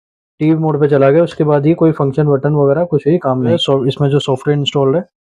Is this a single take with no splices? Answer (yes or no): no